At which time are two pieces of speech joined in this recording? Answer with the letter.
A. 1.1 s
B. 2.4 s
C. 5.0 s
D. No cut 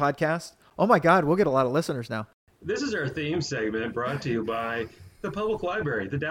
B